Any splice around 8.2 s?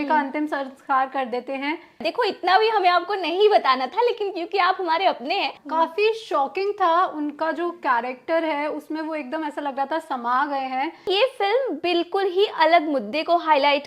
no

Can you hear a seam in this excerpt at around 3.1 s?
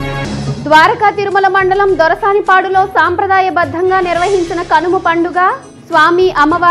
no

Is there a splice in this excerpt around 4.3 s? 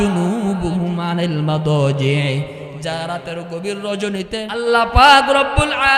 yes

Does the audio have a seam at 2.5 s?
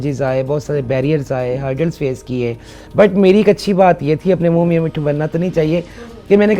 no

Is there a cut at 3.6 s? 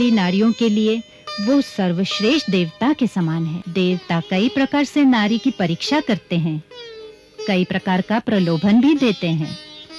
yes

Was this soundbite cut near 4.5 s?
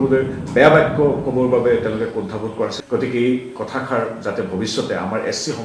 no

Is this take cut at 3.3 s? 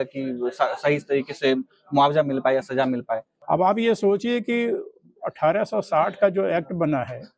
yes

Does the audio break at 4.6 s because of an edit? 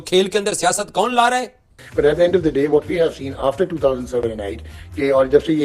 no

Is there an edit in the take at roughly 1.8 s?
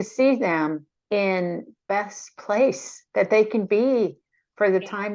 yes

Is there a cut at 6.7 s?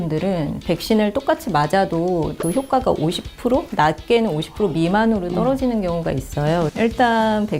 yes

